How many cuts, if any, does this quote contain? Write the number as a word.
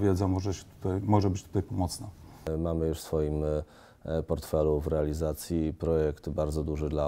one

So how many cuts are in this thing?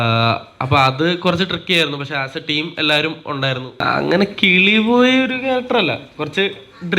one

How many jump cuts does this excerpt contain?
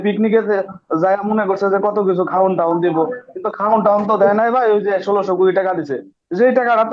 zero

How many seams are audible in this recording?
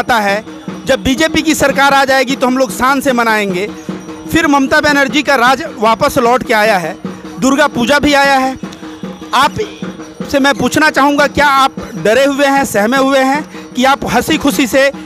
zero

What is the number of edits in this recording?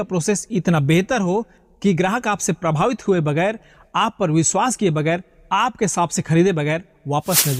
zero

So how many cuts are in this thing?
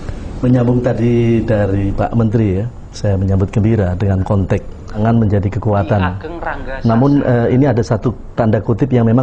one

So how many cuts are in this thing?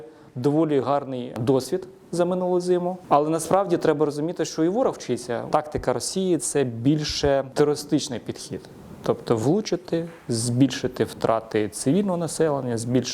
four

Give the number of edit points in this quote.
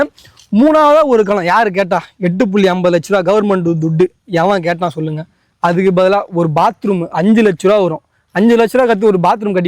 zero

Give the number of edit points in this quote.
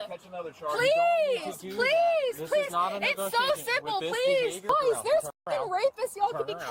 one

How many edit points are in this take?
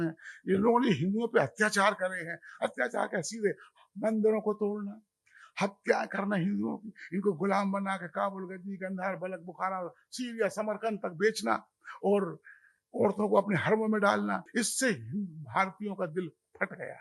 one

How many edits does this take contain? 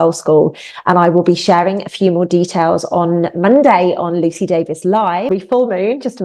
one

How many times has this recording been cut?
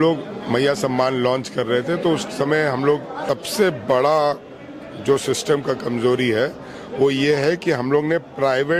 one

